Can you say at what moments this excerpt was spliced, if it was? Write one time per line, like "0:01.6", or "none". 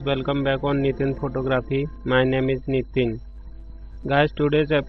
none